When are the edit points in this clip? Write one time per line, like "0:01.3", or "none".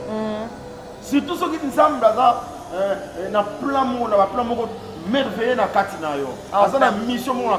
none